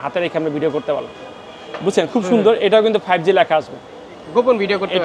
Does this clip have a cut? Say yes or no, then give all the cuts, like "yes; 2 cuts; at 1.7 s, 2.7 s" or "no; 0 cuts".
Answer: no; 0 cuts